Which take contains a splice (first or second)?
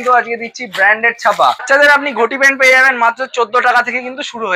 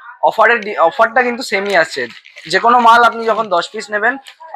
first